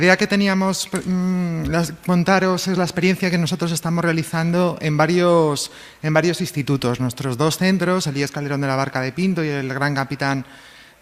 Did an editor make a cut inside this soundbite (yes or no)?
yes